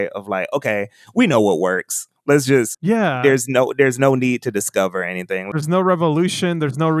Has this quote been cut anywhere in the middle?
yes; 2 cuts; at 2.8 s, 5.5 s

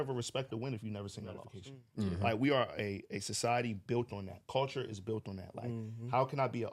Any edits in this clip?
yes; 1 cut; at 1.5 s

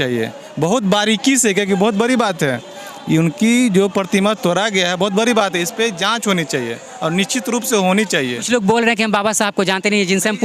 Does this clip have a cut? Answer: no; 0 cuts

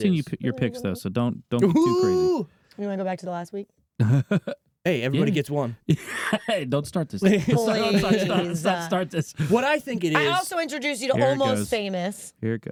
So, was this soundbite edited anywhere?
no; 0 cuts

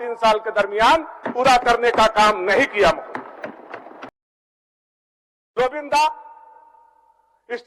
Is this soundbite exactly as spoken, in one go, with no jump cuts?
yes; 0 cuts

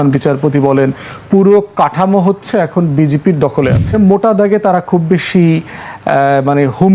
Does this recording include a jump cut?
yes; 1 cut; at 3.9 s

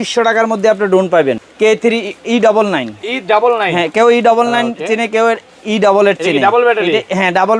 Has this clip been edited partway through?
yes; 1 cut; at 1.4 s

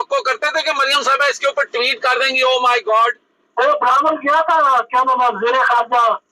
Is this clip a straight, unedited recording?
no; 1 cut; at 3.4 s

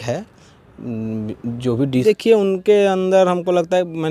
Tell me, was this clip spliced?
yes; 1 cut; at 2.0 s

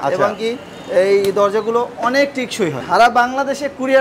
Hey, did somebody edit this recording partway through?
yes; 1 cut; at 2.8 s

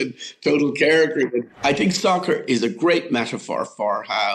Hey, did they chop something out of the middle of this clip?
yes; 1 cut; at 1.5 s

